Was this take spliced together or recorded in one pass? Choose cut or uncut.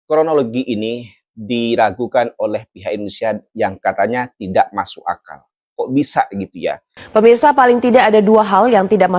cut